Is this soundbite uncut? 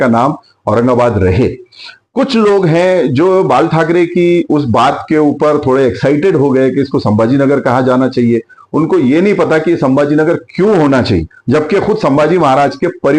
yes; 0 cuts

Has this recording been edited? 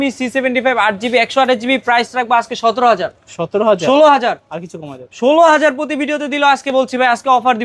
no; 0 cuts

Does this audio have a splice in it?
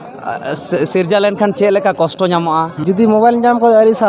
yes; 1 cut; at 2.8 s

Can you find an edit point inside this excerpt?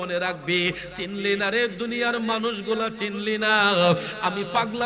no; 0 cuts

